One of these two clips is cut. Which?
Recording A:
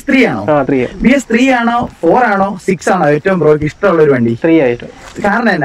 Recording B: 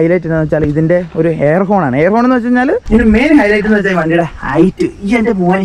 B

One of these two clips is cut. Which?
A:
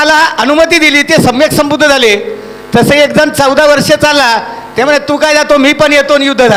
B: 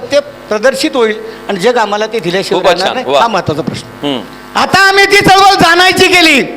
B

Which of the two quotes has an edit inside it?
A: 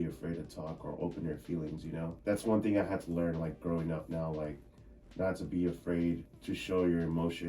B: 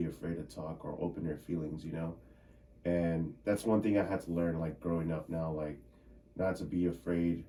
A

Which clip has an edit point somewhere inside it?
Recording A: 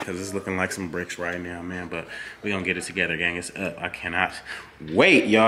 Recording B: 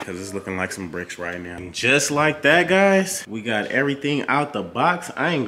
B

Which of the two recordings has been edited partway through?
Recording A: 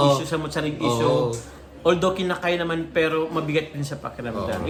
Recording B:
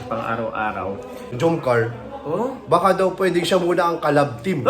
B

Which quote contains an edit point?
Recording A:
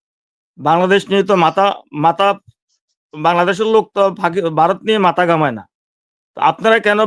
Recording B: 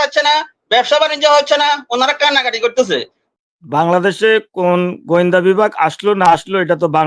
B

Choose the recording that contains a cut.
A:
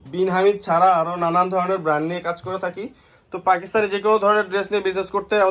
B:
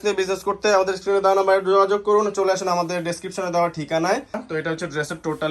B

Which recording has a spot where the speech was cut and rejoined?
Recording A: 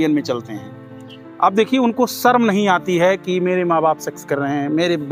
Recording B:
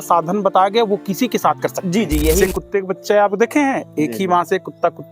B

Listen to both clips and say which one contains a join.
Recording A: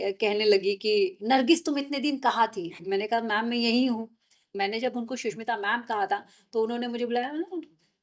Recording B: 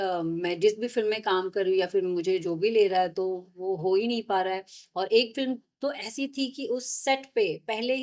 A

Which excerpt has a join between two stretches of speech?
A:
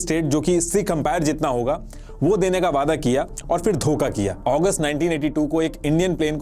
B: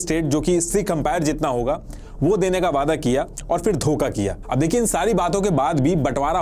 A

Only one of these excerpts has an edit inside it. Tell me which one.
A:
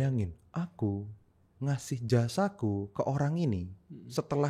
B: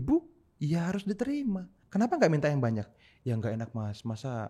B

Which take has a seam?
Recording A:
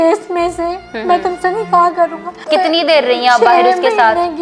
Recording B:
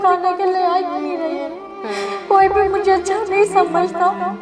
A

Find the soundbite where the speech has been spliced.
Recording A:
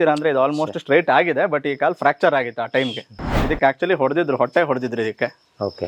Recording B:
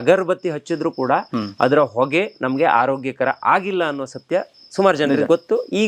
A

